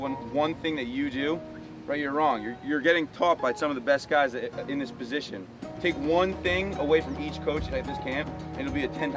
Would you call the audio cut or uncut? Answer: uncut